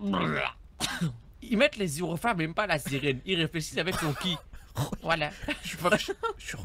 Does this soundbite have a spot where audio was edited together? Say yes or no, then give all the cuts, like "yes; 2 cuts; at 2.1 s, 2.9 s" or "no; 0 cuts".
no; 0 cuts